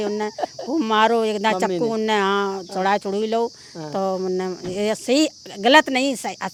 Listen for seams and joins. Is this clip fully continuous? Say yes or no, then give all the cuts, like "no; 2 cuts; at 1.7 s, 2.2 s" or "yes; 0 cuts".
yes; 0 cuts